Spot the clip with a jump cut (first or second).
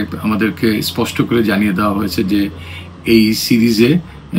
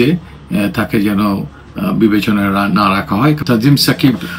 second